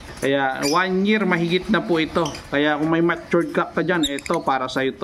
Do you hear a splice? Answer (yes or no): no